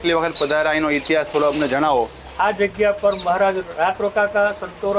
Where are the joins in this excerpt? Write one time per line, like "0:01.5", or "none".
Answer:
0:02.2